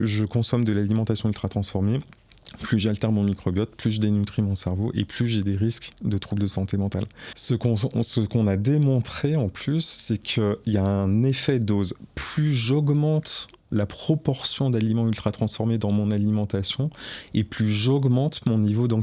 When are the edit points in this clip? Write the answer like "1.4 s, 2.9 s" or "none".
7.3 s